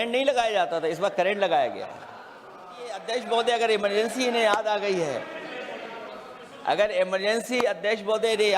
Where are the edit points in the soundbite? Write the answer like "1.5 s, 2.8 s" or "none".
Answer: 3.0 s